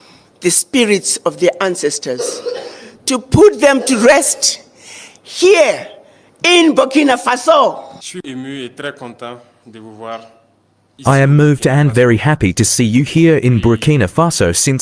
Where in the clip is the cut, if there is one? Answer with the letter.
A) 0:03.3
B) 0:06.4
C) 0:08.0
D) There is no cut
C